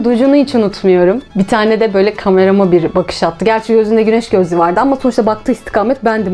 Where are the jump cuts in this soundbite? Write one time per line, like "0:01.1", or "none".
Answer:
0:01.2